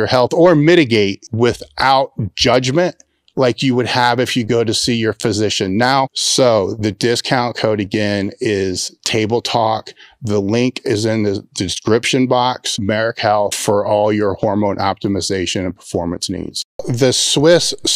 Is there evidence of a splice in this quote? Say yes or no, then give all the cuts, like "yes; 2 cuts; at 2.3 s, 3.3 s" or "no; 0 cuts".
yes; 1 cut; at 16.6 s